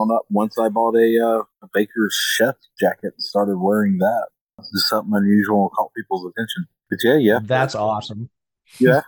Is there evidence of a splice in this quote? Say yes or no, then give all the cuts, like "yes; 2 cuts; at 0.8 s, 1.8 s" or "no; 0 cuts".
no; 0 cuts